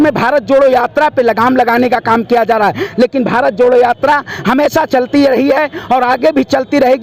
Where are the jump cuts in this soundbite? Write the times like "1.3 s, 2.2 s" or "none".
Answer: none